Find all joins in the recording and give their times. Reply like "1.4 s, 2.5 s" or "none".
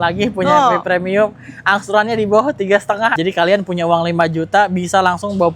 3.2 s